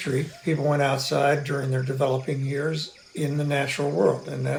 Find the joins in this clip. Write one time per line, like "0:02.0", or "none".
none